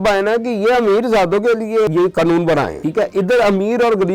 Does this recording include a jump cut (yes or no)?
yes